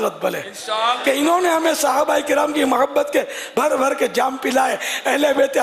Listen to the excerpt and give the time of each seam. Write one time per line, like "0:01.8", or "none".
none